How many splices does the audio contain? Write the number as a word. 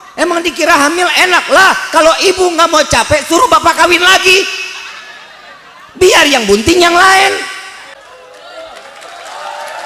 one